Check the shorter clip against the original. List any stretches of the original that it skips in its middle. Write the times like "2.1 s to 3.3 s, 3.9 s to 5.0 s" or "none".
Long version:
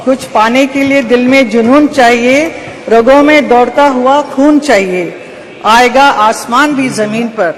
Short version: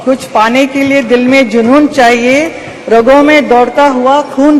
none